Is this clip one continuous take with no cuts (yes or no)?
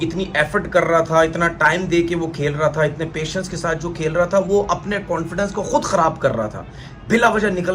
no